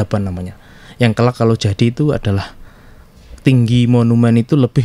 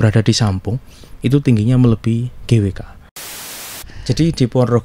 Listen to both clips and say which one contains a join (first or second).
second